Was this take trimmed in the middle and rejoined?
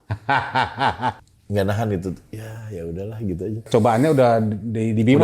yes; 2 cuts; at 1.2 s, 3.7 s

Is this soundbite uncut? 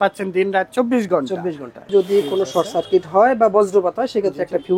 no; 1 cut; at 1.9 s

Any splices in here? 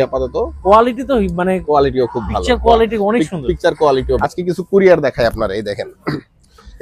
yes; 1 cut; at 4.2 s

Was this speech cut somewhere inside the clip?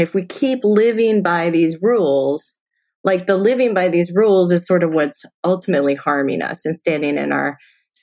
no; 0 cuts

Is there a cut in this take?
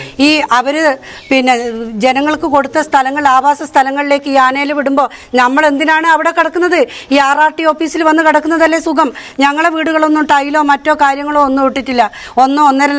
no; 0 cuts

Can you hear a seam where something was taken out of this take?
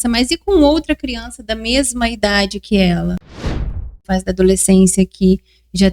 yes; 1 cut; at 3.6 s

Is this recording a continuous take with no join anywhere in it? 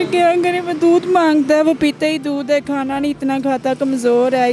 yes; 0 cuts

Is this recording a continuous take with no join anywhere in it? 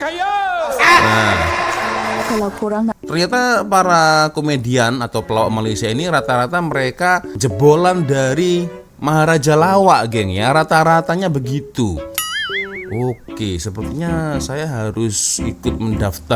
no; 1 cut; at 2.9 s

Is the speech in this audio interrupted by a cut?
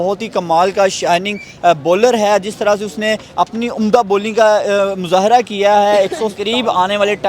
yes; 1 cut; at 6.4 s

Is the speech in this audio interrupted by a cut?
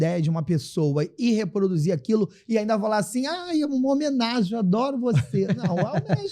no; 0 cuts

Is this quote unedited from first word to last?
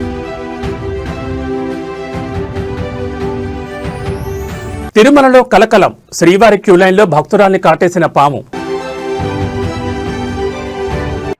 no; 1 cut; at 4.7 s

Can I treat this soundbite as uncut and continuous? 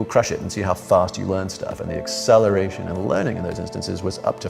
yes; 0 cuts

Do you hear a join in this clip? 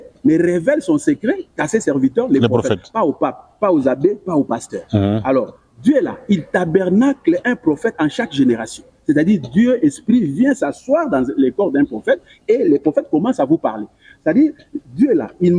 no; 0 cuts

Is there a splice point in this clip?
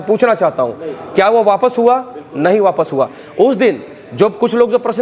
no; 0 cuts

